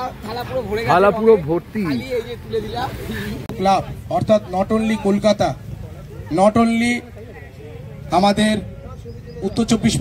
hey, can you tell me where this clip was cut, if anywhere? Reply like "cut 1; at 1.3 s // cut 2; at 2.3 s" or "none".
cut 1; at 3.5 s